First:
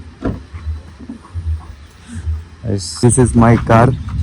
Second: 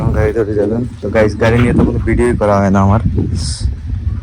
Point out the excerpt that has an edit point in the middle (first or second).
first